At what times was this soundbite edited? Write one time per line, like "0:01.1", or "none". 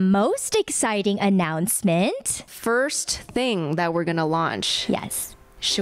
0:02.5